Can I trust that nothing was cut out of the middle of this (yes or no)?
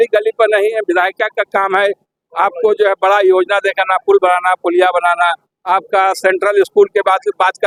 yes